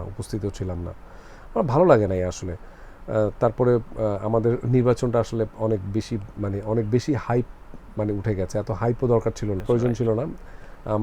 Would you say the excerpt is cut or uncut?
cut